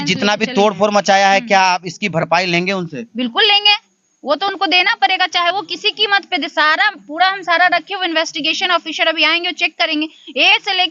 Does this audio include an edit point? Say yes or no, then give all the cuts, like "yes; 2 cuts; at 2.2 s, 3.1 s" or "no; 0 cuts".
no; 0 cuts